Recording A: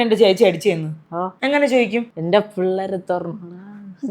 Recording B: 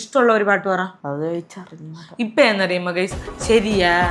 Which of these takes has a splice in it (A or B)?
A